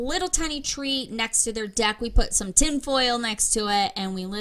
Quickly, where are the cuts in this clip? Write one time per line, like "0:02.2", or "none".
none